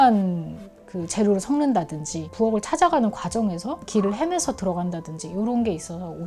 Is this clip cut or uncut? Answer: uncut